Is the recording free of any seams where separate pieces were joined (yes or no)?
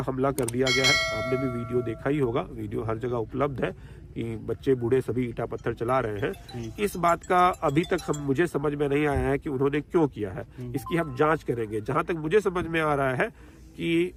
yes